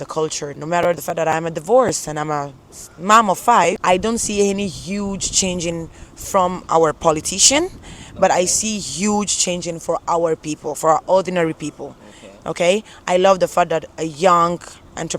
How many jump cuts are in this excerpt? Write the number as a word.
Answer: one